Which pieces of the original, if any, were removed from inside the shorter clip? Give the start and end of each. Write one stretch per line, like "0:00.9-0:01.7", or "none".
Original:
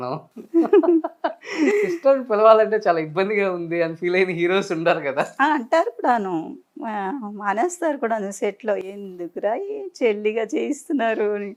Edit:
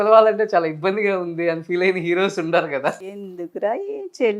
0:05.3-0:08.8

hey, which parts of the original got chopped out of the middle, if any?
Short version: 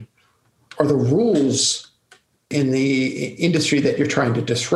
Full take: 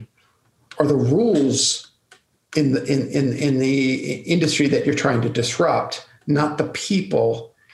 0:02.5-0:03.4

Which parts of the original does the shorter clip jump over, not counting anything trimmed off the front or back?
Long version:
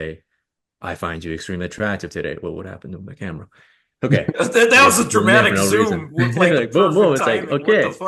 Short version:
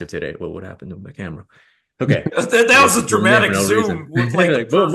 none

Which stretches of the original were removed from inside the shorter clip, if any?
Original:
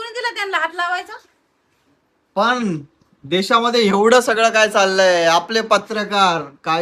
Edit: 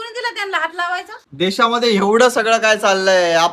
0:01.2-0:03.1

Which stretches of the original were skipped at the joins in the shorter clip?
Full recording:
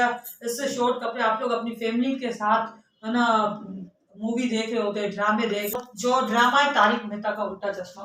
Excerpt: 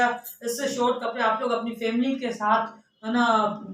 none

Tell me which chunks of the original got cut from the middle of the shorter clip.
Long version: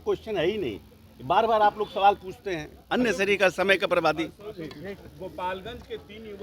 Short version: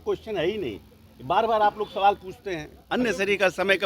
none

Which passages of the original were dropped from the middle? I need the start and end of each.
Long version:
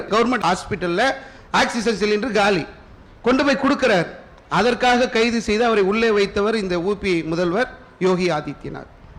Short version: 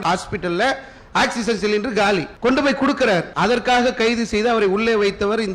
0:02.7-0:03.1
0:04.1-0:04.4

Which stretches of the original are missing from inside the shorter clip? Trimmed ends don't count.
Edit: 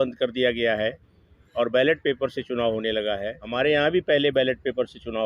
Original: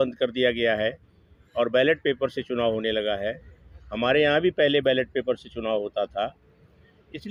0:03.4-0:03.9

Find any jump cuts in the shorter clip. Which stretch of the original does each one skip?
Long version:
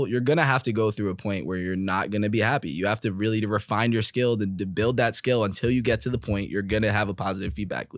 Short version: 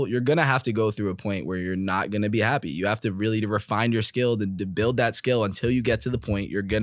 none

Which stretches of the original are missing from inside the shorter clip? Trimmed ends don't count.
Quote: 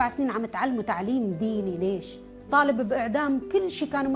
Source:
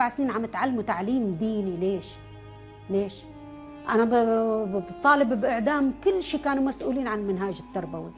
0:02.4-0:04.9

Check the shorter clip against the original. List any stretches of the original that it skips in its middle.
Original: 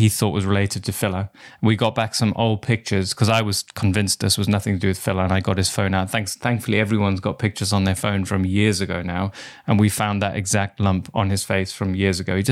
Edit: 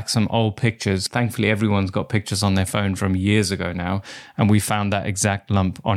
0:03.1-0:06.3

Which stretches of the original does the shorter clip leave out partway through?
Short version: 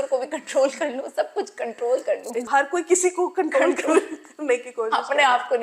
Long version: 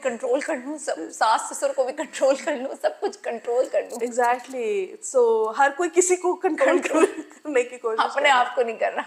0:04.1-0:05.5

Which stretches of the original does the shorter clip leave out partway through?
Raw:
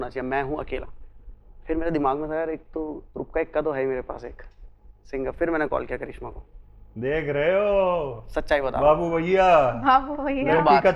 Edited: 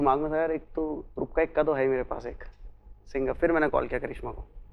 none

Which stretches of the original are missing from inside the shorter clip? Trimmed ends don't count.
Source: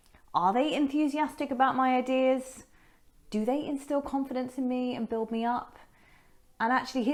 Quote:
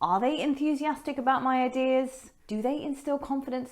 0:02.6-0:03.1

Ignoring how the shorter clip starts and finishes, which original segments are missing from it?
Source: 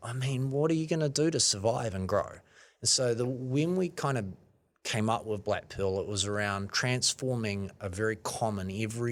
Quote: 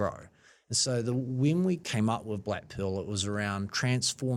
0:04.0-0:04.8

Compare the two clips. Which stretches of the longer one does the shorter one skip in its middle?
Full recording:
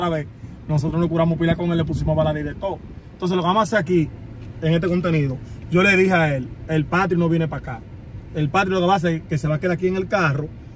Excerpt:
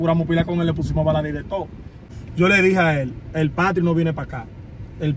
0:03.1-0:05.4

